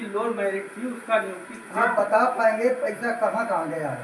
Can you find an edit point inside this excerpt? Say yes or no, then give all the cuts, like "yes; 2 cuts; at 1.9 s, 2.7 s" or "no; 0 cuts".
no; 0 cuts